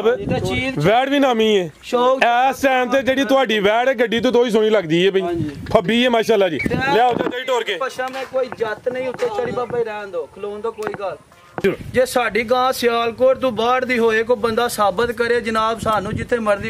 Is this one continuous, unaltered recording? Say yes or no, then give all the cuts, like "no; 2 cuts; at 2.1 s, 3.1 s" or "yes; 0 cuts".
no; 1 cut; at 11.6 s